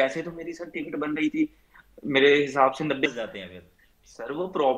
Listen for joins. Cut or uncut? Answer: cut